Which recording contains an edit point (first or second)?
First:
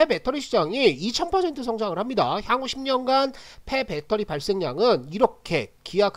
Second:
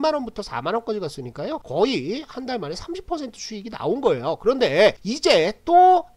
second